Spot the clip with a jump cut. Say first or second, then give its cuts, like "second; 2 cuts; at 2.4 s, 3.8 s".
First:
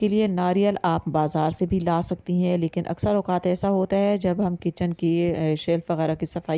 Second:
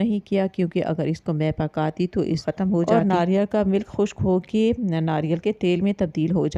second; 1 cut; at 2.4 s